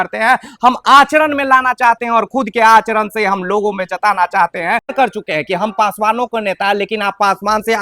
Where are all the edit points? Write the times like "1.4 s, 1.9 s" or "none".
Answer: 4.9 s